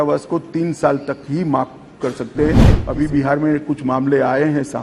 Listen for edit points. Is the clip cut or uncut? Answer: cut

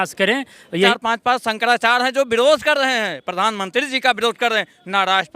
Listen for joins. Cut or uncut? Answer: cut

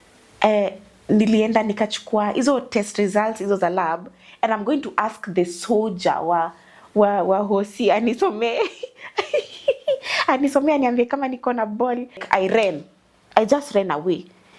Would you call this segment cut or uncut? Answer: cut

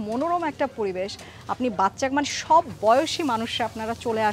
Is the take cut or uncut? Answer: uncut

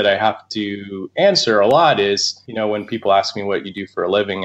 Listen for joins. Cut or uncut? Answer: cut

